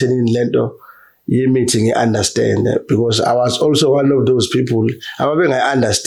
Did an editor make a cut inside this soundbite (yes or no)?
no